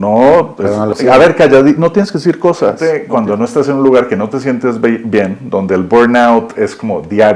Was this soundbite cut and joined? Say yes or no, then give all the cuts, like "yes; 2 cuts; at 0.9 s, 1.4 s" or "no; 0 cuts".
yes; 2 cuts; at 1.0 s, 2.8 s